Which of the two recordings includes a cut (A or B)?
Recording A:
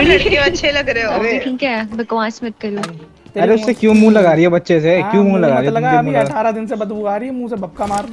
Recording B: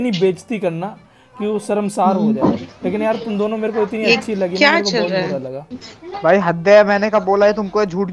A